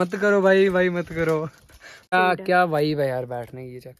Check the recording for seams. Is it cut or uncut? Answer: cut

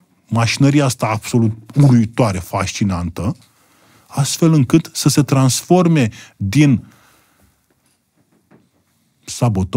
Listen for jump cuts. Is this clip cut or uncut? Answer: uncut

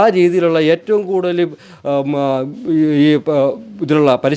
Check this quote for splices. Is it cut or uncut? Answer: uncut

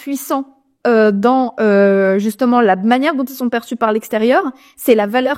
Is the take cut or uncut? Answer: uncut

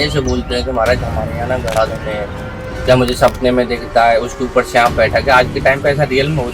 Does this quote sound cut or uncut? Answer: uncut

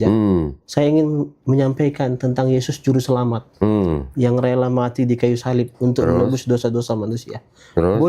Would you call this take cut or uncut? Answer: uncut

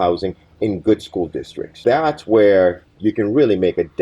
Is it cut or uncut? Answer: cut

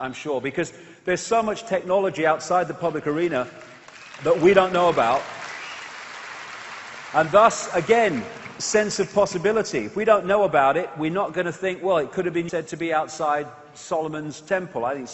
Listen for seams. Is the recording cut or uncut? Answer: uncut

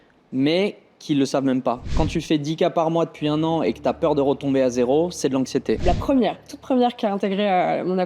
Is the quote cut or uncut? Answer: cut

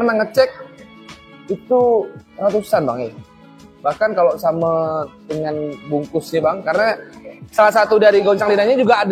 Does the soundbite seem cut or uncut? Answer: uncut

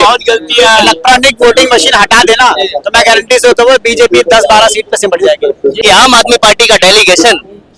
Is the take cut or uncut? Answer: cut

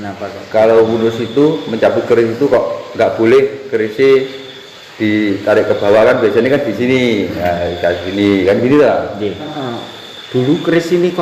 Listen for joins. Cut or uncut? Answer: cut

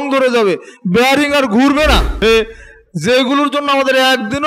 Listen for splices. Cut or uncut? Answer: cut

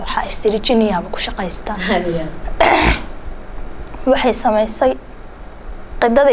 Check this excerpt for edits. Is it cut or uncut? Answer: uncut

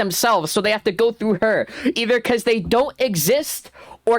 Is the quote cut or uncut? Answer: uncut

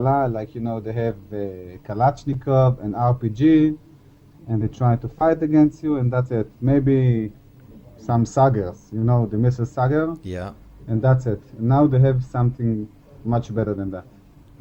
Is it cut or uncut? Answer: uncut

